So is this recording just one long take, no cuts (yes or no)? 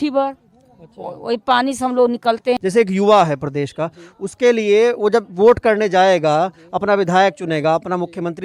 no